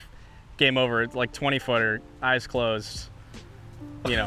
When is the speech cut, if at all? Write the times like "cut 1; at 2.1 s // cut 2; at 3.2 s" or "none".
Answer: none